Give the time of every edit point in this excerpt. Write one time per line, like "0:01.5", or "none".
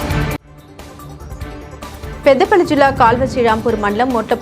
0:01.7

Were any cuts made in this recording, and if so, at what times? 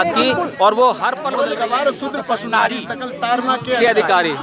0:01.2

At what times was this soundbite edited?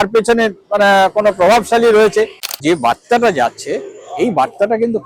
0:02.4

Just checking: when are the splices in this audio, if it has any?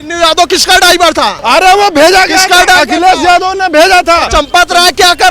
0:01.4

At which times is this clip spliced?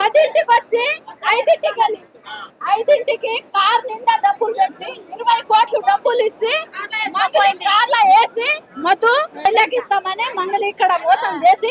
0:09.4

